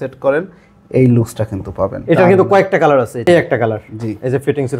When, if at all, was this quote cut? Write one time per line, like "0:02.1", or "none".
0:02.0
0:03.2